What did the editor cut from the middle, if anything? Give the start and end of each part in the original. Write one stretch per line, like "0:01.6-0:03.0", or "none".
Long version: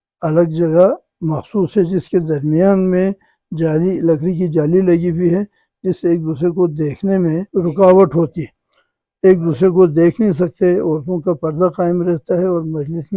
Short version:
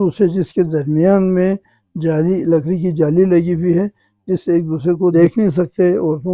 0:06.7-0:09.9

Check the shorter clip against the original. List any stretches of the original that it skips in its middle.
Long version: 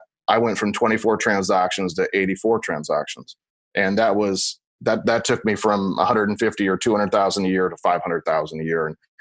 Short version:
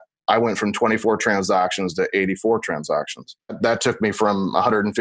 0:03.6-0:05.0

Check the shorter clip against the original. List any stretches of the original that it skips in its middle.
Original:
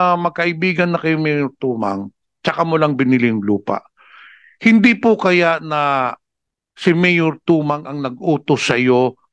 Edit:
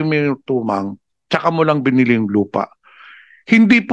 none

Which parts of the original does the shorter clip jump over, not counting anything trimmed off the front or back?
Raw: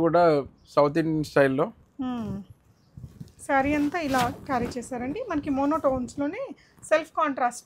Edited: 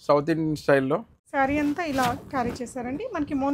0:01.8-0:03.3

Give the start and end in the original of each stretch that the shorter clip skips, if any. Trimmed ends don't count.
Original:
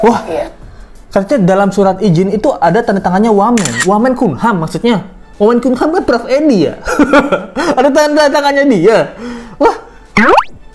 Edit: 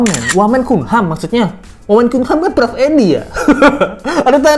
none

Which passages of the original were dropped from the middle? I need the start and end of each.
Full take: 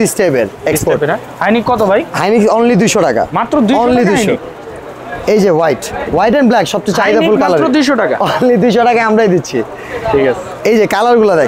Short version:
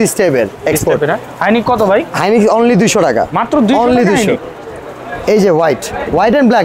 none

